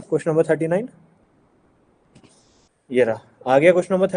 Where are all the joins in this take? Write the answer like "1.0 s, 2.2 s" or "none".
2.7 s